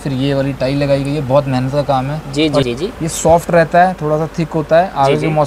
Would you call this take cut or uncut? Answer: cut